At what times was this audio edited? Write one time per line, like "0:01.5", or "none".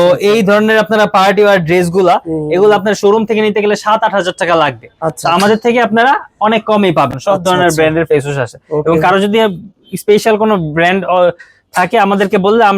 0:07.1

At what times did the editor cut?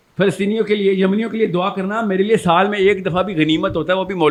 none

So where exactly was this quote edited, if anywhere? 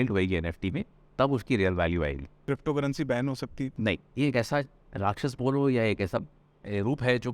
0:02.3
0:04.1

